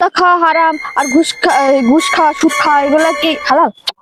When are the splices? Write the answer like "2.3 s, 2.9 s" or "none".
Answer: none